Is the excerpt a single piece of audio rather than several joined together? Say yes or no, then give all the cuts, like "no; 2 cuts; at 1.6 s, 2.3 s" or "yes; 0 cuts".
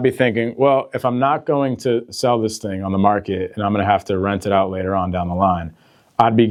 yes; 0 cuts